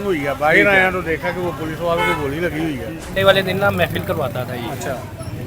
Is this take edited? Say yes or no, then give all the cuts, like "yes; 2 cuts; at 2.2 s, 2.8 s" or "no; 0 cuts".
yes; 1 cut; at 3.1 s